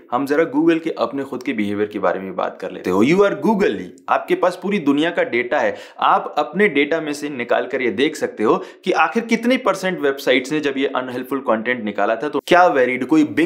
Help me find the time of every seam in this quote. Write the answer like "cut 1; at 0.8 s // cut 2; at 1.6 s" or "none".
cut 1; at 2.7 s // cut 2; at 12.3 s